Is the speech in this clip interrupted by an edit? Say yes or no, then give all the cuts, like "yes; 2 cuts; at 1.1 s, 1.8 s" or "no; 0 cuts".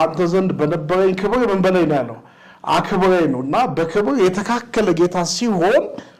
no; 0 cuts